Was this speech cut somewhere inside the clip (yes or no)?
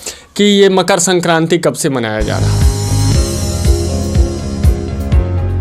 no